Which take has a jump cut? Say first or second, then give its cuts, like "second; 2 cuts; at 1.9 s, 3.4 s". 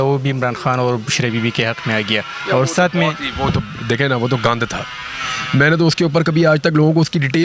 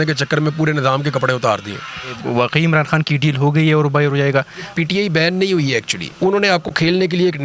second; 2 cuts; at 2.1 s, 4.7 s